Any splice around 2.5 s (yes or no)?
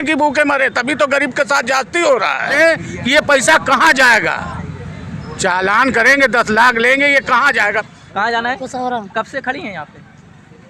yes